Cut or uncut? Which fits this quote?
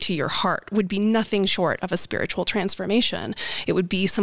uncut